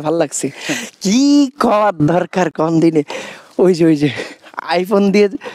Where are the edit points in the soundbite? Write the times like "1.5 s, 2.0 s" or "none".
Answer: none